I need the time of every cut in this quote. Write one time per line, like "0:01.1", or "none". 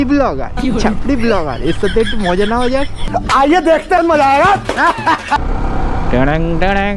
0:03.0
0:05.4